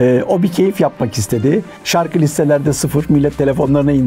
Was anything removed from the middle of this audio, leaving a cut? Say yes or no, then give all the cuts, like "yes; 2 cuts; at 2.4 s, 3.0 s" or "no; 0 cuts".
yes; 1 cut; at 1.8 s